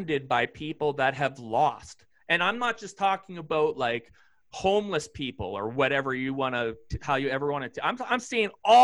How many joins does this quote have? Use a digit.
0